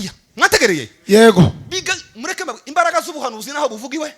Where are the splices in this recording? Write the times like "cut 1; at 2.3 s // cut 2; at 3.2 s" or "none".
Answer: none